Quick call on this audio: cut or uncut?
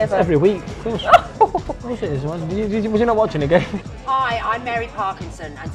cut